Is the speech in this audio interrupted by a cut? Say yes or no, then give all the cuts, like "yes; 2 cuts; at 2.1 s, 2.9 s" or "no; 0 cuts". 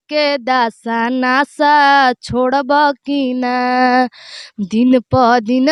no; 0 cuts